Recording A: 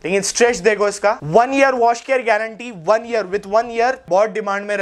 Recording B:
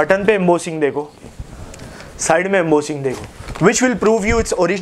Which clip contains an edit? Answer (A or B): A